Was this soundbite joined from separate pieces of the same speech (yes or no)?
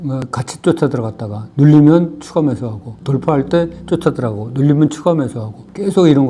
no